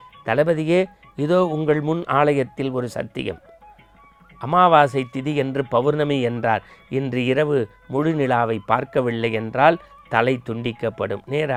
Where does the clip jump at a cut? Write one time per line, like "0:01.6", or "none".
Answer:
none